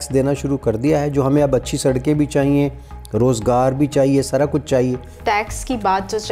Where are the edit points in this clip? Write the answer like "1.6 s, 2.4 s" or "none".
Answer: 5.2 s